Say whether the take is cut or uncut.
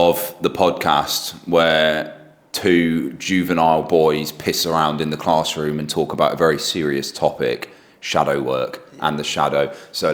uncut